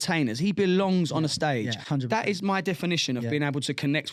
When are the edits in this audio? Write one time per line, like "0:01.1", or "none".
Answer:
none